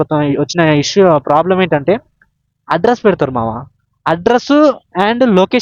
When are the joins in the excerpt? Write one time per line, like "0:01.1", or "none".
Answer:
none

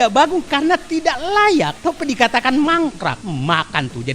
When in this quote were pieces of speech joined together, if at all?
0:01.7
0:03.2

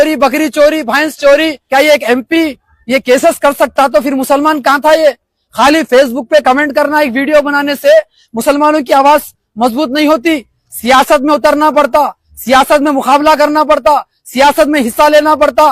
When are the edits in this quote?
0:01.6

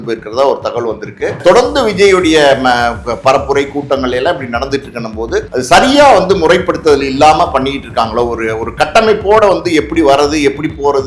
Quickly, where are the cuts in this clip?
0:01.4
0:05.5

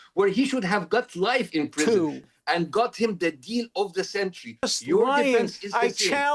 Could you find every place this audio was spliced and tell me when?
0:02.2
0:04.8

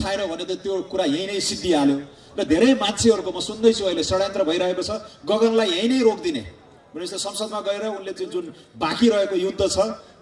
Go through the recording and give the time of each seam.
none

